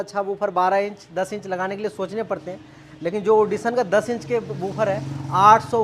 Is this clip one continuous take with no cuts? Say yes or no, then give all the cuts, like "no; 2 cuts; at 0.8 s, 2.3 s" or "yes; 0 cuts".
yes; 0 cuts